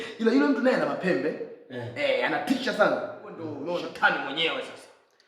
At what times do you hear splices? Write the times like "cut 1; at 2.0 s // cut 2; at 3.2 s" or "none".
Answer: cut 1; at 3.5 s